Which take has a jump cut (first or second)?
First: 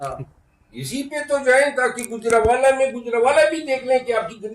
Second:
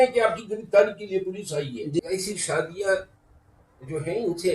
second